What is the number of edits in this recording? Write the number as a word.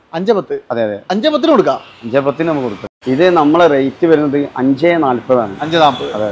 one